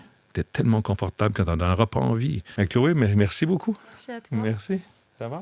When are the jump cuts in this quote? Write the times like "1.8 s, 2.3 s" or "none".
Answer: 2.4 s